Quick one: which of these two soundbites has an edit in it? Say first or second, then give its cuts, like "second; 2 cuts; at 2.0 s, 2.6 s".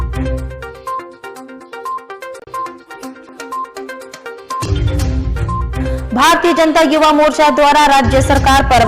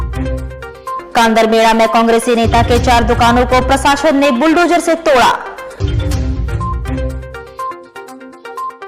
second; 1 cut; at 0.9 s